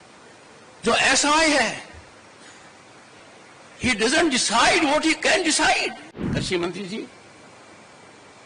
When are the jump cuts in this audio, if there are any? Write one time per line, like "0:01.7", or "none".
0:06.1

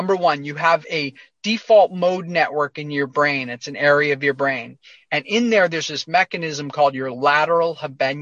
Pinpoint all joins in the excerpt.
none

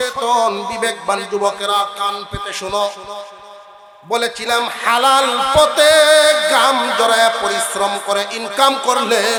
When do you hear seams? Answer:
none

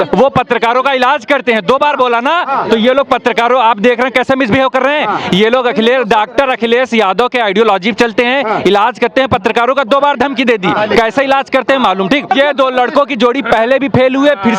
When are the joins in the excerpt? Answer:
0:12.3

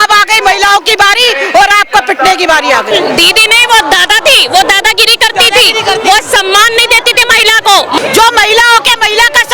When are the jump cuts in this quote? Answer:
0:02.9
0:08.0

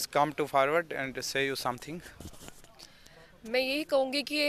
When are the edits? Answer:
none

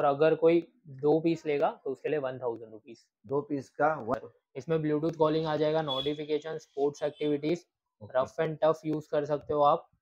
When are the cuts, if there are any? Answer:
0:04.2

